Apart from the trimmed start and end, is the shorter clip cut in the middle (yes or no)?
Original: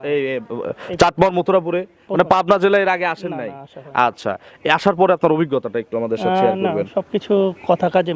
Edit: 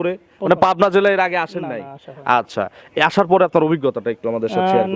no